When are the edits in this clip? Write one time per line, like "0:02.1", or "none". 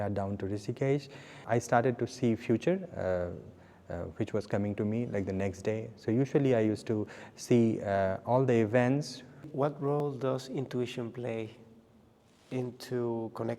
0:01.4
0:09.5